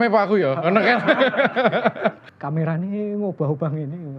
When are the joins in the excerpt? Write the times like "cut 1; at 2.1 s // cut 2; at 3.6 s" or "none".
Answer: cut 1; at 2.3 s